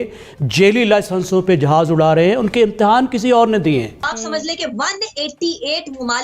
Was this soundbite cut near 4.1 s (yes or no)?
yes